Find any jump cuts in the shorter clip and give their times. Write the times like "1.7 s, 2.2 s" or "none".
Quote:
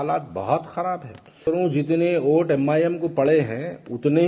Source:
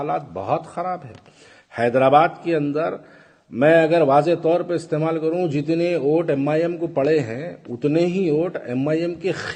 1.4 s